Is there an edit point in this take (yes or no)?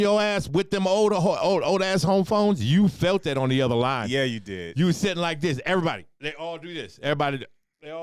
no